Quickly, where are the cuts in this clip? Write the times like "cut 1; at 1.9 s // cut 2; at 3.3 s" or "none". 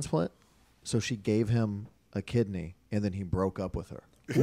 none